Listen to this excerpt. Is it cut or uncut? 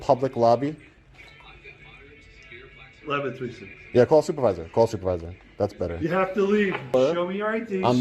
cut